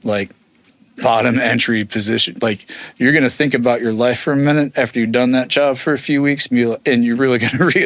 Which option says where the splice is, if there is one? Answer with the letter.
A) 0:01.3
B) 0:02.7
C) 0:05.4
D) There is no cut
D